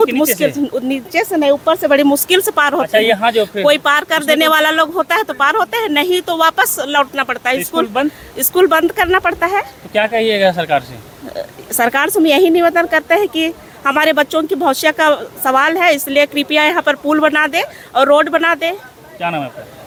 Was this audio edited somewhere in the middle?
no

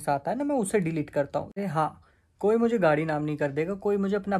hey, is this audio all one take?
no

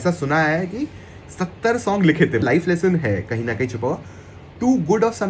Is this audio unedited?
no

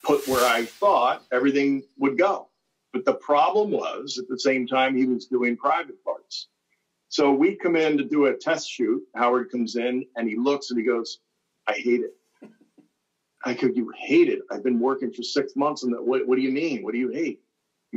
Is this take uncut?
yes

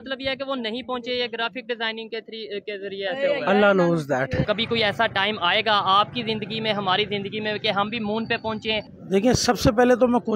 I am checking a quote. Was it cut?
yes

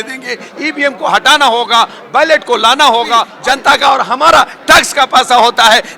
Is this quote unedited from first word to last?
no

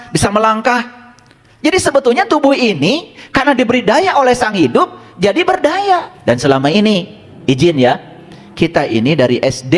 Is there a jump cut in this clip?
yes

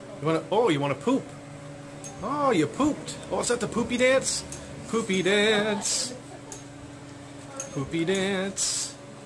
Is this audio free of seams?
no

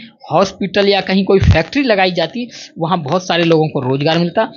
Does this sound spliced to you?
no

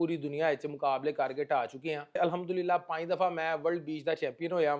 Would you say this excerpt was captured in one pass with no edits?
no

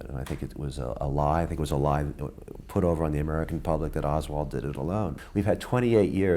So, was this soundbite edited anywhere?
yes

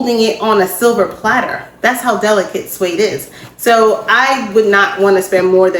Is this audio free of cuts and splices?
yes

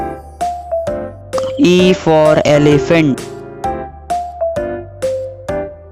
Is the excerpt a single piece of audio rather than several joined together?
no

